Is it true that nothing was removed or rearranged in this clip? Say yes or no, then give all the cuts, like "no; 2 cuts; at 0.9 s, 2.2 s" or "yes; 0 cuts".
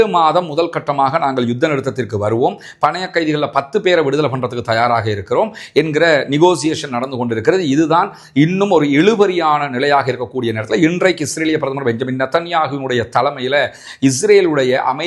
yes; 0 cuts